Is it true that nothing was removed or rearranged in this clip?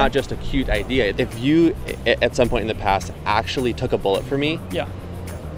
no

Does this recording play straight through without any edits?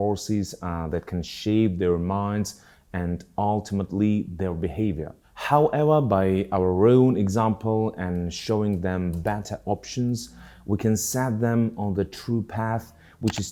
yes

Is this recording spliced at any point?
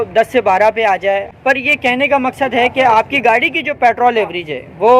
yes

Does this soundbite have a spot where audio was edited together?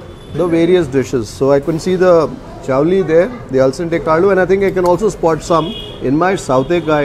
no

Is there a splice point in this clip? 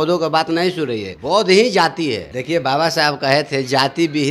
yes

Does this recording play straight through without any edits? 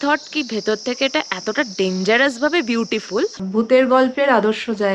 no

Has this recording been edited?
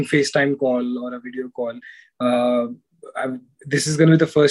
no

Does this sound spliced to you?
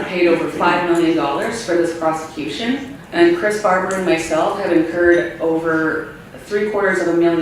yes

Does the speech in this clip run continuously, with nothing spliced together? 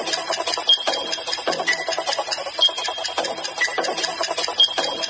yes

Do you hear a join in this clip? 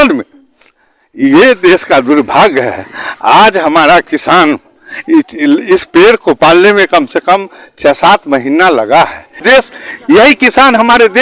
yes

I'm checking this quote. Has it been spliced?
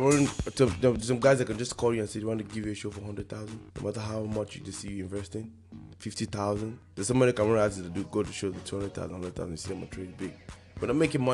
yes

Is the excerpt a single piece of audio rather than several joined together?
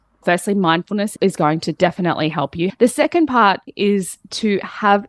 no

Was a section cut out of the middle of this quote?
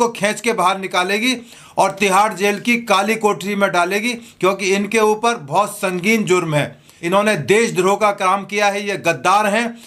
yes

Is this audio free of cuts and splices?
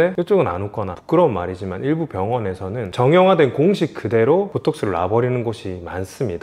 no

